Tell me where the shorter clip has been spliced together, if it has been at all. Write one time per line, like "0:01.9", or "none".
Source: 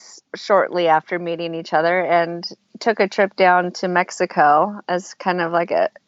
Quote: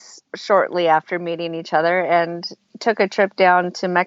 none

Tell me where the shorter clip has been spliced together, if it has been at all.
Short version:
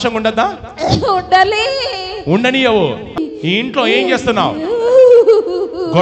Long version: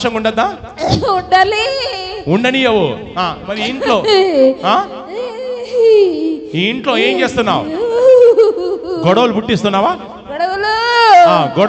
0:03.2

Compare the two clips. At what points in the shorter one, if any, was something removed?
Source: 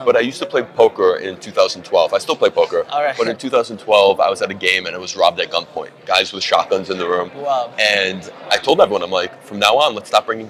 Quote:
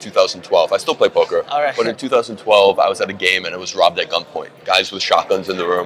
none

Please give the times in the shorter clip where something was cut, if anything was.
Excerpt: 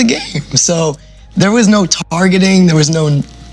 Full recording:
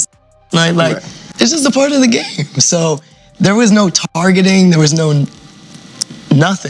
none

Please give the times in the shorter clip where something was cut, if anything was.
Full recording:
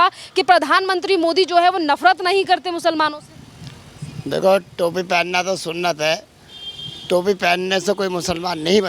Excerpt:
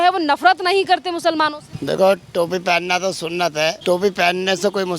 0:01.7
0:03.8

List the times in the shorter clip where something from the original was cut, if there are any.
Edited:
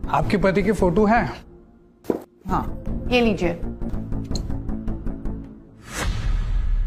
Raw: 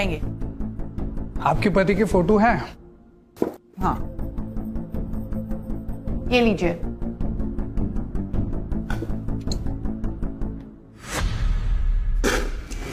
0:02.8
0:03.9

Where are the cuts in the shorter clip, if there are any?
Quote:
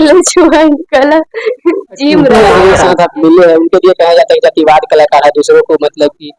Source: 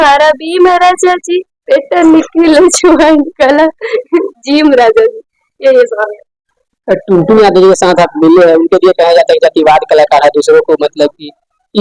0:02.3

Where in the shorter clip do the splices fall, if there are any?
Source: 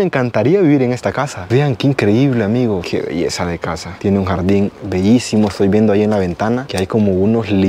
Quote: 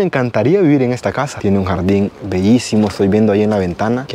0:01.3

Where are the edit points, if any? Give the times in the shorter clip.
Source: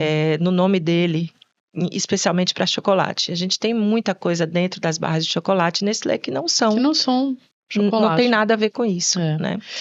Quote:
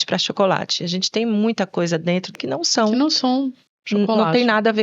0:02.3

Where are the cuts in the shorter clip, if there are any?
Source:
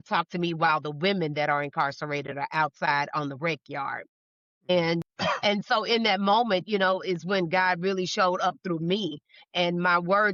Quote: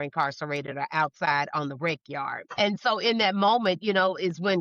0:02.5

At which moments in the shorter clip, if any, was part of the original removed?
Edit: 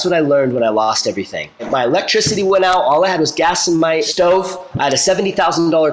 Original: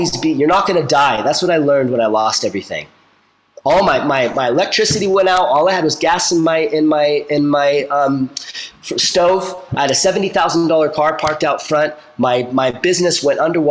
0:01.7
0:04.1

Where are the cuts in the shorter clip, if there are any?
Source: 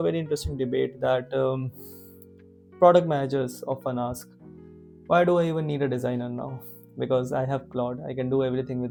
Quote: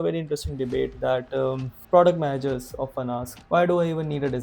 0:01.7
0:03.3

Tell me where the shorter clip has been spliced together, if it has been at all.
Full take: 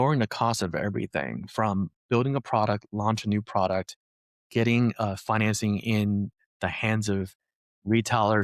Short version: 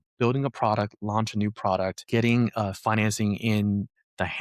0:02.0

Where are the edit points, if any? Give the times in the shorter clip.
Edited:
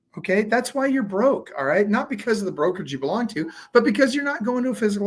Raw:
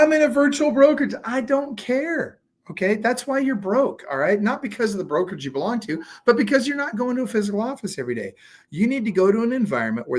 none

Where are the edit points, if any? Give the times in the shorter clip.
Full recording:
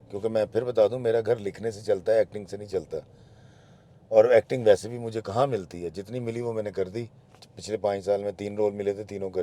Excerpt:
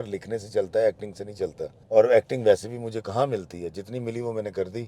0:01.7

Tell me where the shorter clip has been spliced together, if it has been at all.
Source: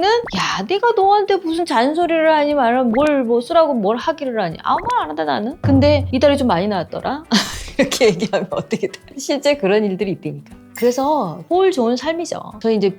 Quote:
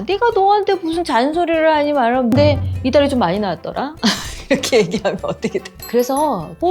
0:02.7
0:05.7

